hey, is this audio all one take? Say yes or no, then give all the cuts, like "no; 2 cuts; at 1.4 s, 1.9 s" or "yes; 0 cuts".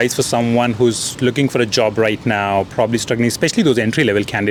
yes; 0 cuts